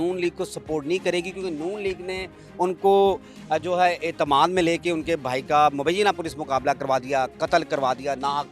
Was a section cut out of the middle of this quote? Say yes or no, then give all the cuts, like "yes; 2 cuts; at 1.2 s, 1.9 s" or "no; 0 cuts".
no; 0 cuts